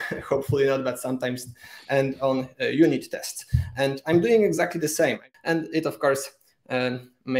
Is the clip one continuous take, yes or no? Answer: no